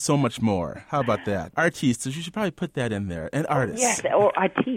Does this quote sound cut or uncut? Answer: cut